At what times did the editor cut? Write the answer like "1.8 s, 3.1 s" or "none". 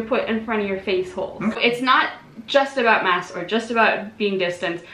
1.5 s